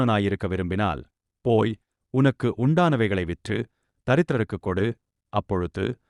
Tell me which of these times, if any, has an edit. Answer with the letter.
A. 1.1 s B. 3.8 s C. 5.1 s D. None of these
D